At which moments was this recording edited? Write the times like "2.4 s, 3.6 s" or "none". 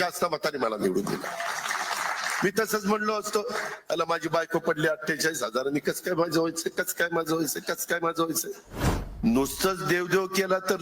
9.0 s

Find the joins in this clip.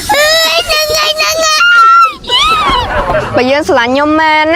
none

